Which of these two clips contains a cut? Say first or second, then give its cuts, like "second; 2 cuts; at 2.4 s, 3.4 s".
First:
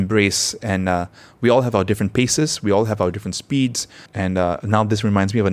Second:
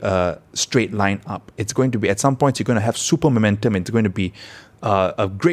first; 1 cut; at 4.0 s